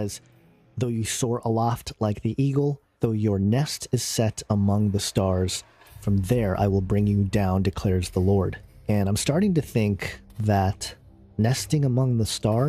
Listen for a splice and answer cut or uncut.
cut